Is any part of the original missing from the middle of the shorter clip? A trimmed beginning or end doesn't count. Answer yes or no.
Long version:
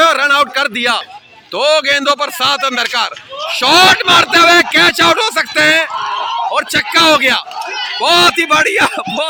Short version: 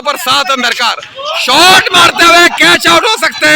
no